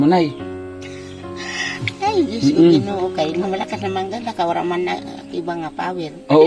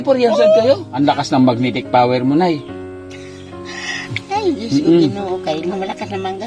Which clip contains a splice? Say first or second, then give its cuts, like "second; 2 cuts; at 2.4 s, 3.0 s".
second; 1 cut; at 1.0 s